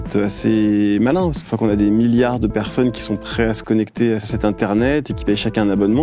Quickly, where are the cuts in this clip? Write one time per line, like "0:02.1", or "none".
0:01.4
0:04.3